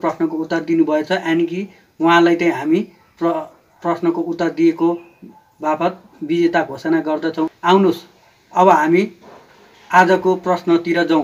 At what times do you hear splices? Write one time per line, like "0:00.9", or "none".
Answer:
0:07.5

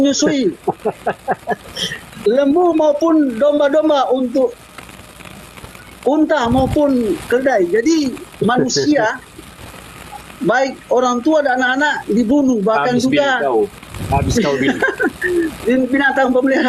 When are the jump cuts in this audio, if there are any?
none

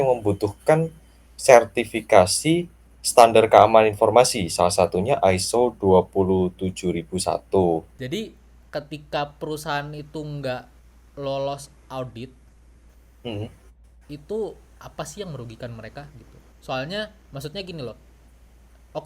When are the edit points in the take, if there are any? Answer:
0:07.9

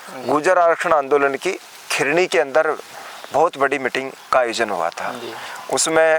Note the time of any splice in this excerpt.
none

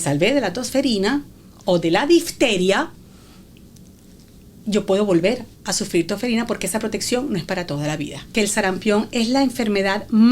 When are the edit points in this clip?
0:08.2

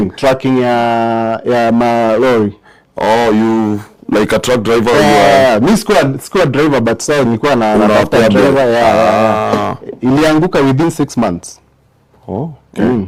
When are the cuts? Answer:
none

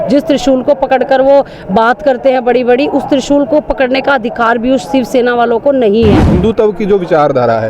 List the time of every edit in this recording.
0:06.3

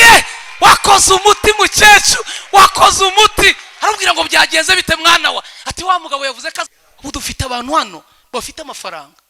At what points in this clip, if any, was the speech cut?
0:06.7

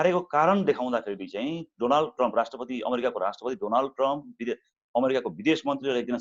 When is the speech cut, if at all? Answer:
none

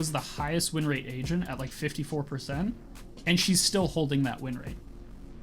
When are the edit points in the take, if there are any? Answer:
none

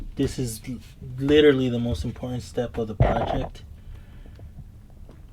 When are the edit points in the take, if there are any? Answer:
none

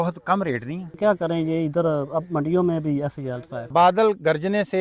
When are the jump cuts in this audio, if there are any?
0:01.0
0:03.5

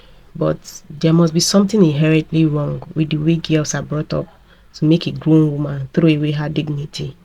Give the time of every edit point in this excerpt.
none

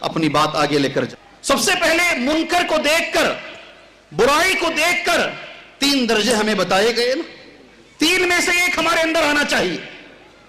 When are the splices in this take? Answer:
0:01.1

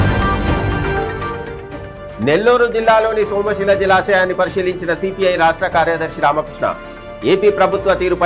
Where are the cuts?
none

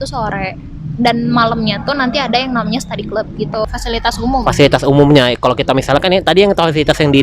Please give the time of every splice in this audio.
0:03.6

